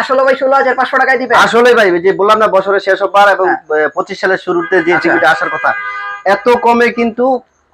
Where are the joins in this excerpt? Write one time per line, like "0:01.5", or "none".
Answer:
none